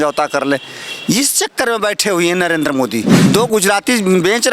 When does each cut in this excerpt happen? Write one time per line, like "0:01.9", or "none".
0:03.1

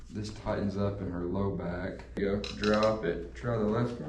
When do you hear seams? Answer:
0:02.2

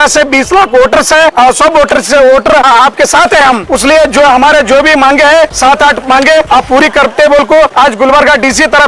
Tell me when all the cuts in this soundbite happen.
0:01.3
0:02.7
0:03.6
0:05.6
0:06.5
0:07.7

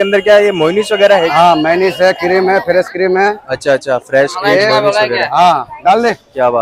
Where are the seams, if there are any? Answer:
none

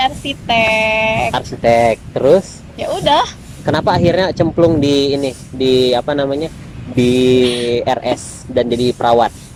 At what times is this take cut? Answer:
none

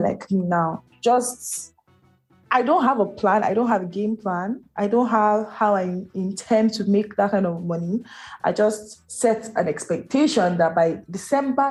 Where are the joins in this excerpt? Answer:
none

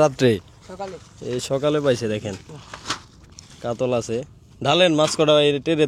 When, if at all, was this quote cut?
none

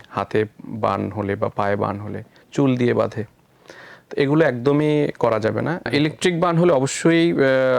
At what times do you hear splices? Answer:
0:05.9

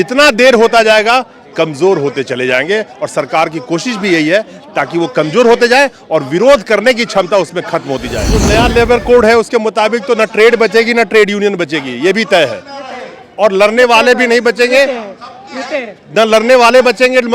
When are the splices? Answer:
0:08.4

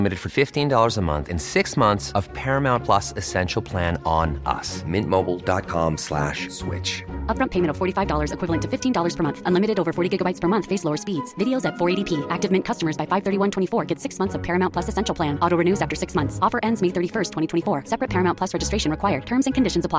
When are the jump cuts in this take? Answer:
none

